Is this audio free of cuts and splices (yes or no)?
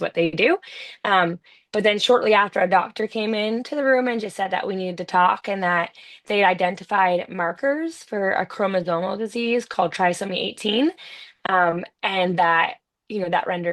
yes